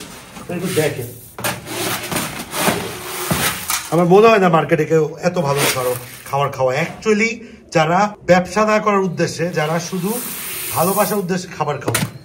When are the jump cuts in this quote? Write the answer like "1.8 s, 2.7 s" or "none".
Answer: none